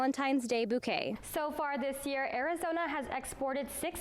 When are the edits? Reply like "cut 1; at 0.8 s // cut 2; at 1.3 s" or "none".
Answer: cut 1; at 1.2 s